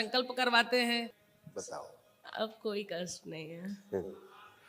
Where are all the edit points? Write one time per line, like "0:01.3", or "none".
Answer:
0:01.2